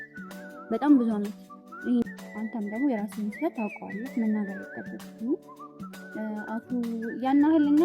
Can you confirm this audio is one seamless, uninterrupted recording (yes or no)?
no